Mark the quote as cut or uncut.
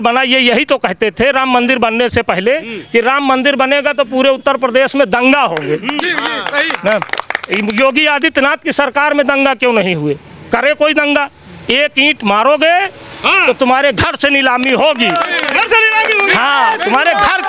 uncut